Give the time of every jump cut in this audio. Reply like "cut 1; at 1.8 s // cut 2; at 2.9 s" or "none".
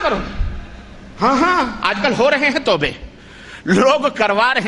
none